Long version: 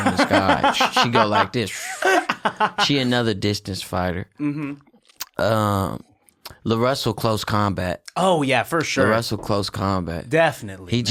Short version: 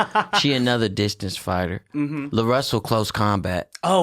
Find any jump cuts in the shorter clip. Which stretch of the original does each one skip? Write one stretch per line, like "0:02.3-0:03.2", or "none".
0:04.7-0:06.6